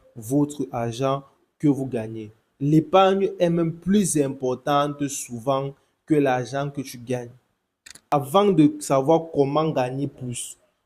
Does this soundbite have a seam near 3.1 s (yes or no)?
no